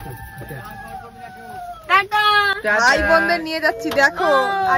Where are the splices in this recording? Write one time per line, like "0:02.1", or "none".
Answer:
none